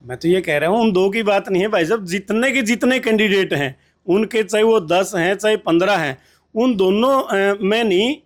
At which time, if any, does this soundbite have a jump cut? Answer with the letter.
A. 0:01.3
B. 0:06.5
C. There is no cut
C